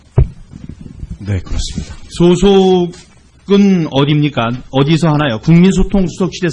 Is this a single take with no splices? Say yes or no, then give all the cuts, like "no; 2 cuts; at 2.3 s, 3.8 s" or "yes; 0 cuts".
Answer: no; 1 cut; at 5.4 s